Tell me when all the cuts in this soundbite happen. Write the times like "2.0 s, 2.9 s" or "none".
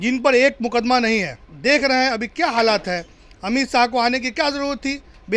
1.4 s